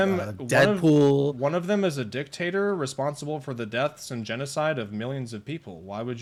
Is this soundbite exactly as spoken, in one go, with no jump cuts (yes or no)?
yes